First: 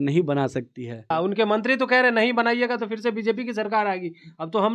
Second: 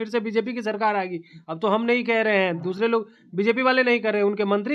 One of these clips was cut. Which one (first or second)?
first